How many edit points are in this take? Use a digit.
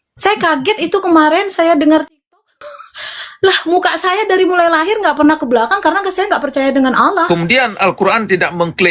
1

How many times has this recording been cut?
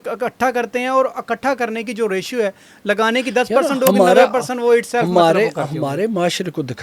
0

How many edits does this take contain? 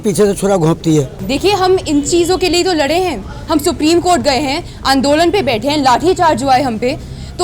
1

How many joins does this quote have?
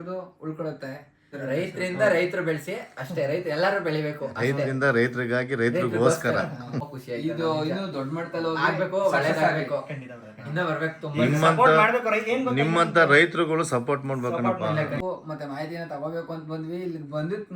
3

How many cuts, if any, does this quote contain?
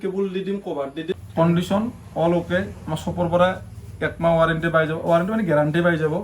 1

